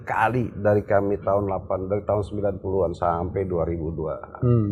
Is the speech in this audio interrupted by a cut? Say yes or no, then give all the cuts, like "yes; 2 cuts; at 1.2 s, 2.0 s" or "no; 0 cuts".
no; 0 cuts